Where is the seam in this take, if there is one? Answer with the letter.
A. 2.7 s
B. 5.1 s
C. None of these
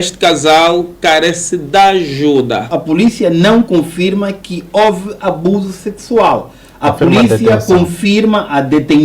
A